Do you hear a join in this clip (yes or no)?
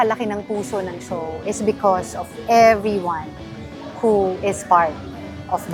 no